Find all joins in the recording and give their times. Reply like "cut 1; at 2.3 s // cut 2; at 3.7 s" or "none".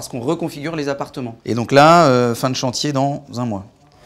cut 1; at 1.3 s